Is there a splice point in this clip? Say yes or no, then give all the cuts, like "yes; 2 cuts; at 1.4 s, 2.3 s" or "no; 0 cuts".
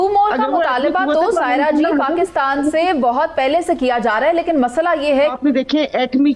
yes; 1 cut; at 5.3 s